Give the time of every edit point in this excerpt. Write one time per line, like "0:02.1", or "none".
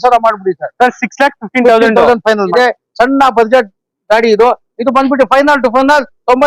0:02.5